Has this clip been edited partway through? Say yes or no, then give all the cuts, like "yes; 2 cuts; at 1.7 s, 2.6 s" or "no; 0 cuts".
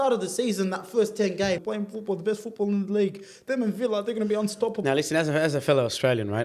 yes; 2 cuts; at 1.6 s, 4.8 s